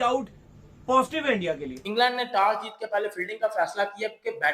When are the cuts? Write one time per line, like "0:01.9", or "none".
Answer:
0:01.8